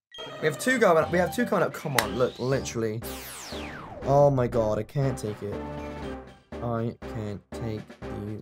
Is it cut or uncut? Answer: uncut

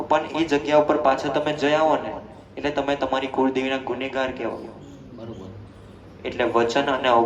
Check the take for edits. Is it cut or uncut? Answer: uncut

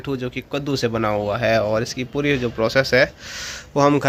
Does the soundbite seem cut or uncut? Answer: uncut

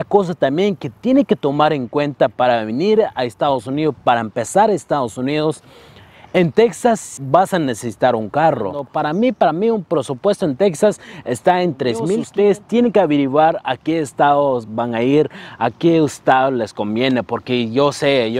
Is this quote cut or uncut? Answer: cut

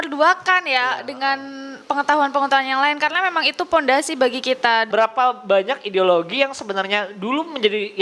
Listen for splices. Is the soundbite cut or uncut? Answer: cut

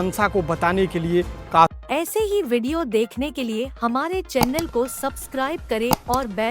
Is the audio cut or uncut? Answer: cut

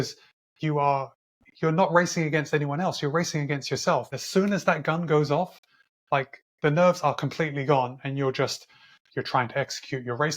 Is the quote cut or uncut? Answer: cut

